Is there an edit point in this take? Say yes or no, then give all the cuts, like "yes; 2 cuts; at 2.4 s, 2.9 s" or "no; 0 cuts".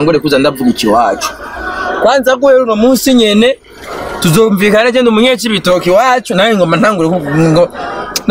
no; 0 cuts